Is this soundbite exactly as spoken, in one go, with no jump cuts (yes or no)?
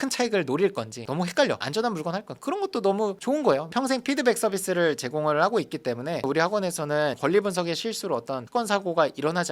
no